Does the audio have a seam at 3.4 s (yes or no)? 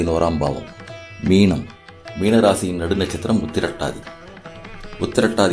no